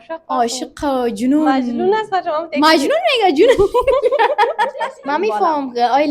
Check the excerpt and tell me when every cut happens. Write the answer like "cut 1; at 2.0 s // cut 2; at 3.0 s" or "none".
cut 1; at 4.7 s